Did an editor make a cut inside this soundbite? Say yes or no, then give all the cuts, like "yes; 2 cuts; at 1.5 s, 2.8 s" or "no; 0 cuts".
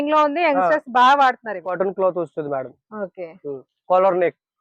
yes; 1 cut; at 1.7 s